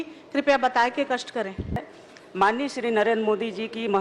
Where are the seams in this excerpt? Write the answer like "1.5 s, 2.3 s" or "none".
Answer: 1.8 s